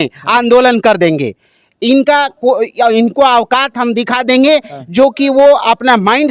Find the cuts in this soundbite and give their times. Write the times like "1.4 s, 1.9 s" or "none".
none